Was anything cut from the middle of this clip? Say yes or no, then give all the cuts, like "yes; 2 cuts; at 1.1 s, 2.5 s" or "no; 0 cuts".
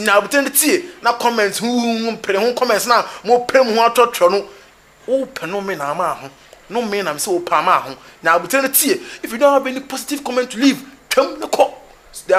no; 0 cuts